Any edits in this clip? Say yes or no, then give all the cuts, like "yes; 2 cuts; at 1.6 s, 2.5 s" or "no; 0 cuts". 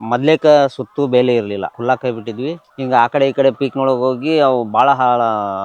yes; 1 cut; at 1.7 s